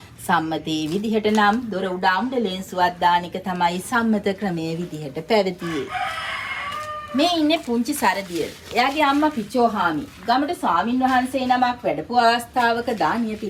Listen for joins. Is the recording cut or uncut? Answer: uncut